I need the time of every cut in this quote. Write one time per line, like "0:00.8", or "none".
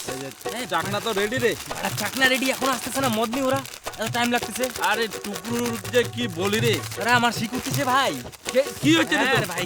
none